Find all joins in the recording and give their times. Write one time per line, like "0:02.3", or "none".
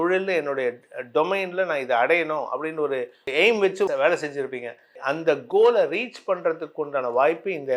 none